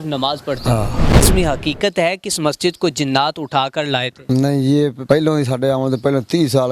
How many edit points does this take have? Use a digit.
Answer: 3